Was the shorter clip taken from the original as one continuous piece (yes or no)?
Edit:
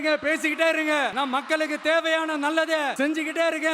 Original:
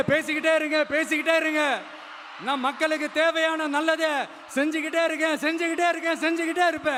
no